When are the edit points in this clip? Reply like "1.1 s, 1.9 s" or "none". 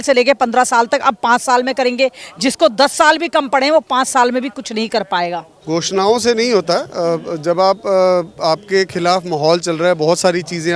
5.5 s